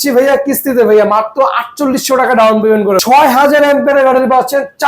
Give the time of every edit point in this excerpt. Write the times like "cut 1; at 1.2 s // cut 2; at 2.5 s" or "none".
cut 1; at 3.0 s

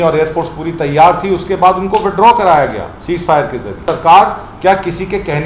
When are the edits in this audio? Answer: cut 1; at 3.9 s

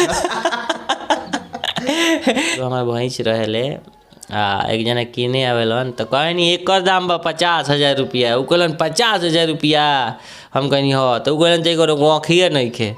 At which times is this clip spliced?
cut 1; at 2.6 s

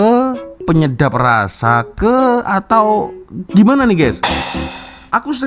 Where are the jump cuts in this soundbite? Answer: none

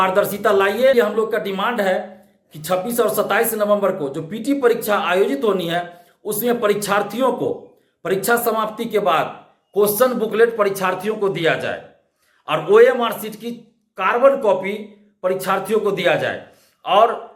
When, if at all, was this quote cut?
cut 1; at 0.9 s

